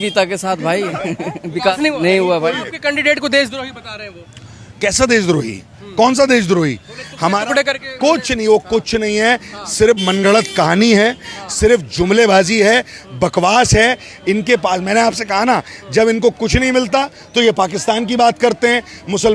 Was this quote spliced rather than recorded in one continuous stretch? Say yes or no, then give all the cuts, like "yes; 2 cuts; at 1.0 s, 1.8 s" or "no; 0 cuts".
no; 0 cuts